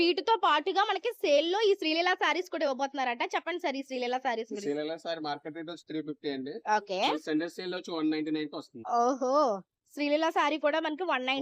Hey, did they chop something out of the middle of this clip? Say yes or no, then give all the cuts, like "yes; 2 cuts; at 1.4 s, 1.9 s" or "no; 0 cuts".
no; 0 cuts